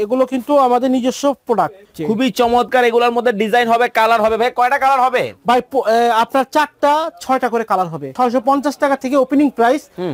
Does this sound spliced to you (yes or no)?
yes